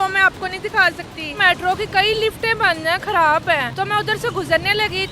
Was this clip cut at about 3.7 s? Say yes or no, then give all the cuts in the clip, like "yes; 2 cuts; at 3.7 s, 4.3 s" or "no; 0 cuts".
yes; 2 cuts; at 1.4 s, 3.7 s